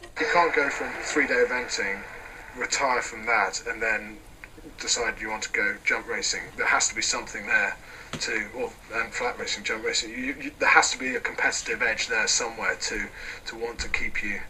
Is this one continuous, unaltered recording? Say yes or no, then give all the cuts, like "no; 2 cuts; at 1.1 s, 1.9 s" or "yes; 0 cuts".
yes; 0 cuts